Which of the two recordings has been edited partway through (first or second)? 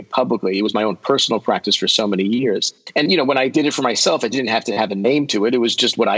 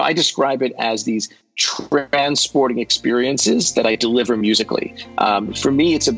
first